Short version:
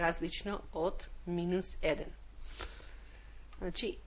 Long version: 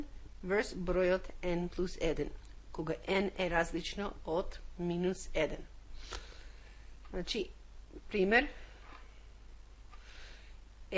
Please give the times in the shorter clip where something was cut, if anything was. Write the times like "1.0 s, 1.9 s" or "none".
none